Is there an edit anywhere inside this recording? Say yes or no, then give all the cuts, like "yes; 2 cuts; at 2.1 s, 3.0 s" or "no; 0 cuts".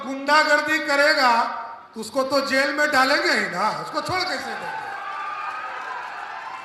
no; 0 cuts